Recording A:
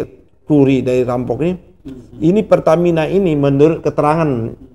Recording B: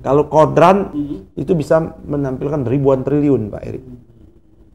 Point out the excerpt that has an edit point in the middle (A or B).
B